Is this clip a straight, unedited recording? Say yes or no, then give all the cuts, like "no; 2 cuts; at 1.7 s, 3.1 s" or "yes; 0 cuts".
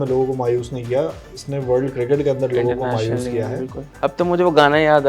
no; 1 cut; at 4.0 s